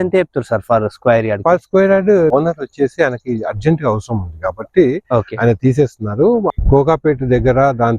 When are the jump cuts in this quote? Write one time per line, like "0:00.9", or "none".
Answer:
0:02.3
0:06.5

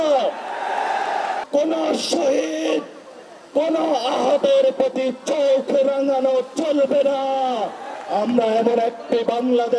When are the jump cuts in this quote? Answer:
0:01.4
0:07.9

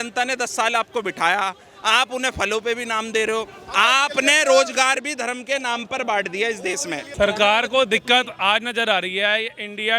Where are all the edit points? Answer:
0:07.1

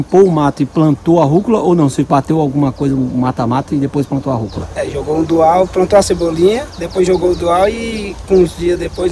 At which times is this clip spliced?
none

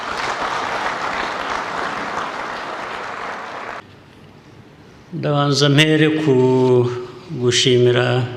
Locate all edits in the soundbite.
0:03.8

